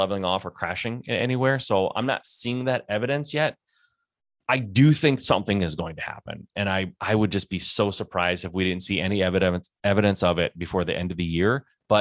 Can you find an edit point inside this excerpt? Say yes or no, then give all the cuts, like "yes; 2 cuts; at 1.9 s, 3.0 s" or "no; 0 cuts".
no; 0 cuts